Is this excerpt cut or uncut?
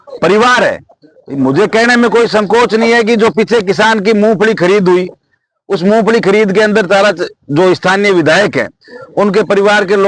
uncut